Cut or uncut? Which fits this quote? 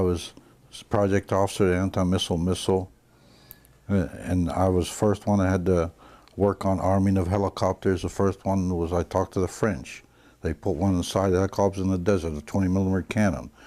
cut